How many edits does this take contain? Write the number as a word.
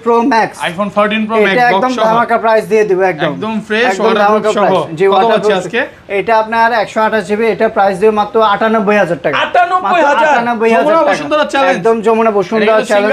zero